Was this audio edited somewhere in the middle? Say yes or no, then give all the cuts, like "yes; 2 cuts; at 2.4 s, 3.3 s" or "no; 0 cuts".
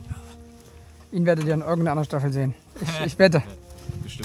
no; 0 cuts